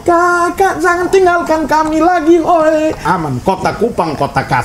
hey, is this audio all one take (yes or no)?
no